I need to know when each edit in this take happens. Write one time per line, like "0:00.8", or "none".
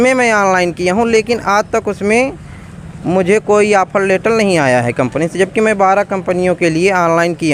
none